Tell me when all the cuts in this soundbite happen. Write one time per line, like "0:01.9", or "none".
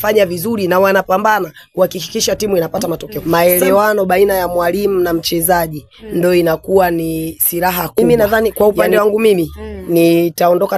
0:03.1
0:08.0